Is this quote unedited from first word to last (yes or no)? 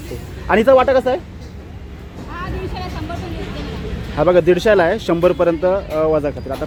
yes